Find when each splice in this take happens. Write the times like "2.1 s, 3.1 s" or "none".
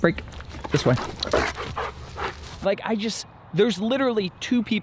2.5 s